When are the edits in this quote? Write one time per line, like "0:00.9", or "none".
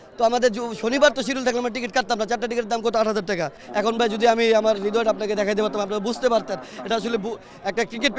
0:03.6